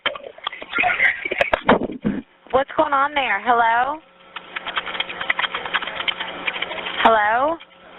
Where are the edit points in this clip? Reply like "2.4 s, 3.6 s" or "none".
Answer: none